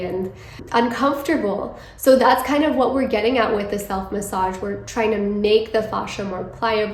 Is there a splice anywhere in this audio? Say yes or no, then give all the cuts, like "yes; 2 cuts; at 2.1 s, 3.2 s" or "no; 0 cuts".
no; 0 cuts